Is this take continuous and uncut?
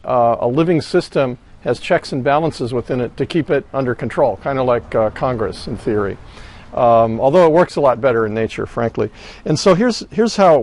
no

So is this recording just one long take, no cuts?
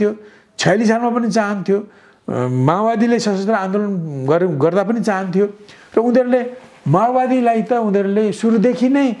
yes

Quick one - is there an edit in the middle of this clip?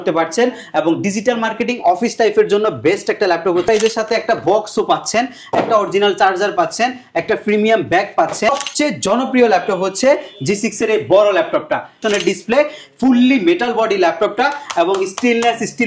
yes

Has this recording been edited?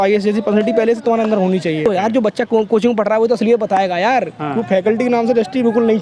yes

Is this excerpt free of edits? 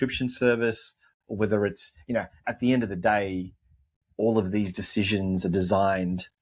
yes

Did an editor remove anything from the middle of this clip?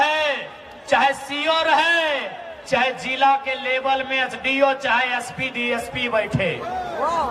no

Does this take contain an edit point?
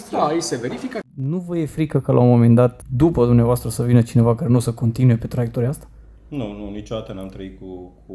yes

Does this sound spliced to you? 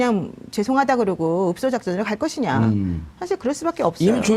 yes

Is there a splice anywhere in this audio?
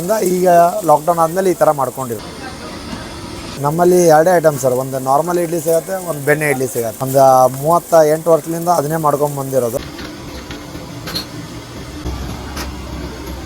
yes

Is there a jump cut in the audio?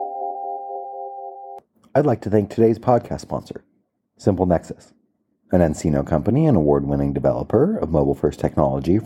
yes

